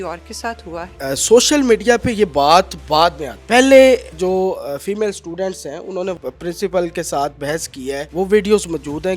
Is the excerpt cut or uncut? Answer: cut